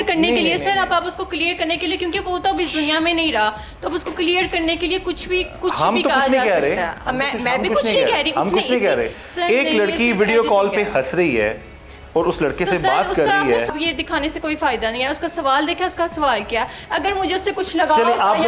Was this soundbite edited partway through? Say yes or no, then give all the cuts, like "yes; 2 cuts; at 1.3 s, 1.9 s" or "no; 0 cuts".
yes; 2 cuts; at 9.2 s, 13.7 s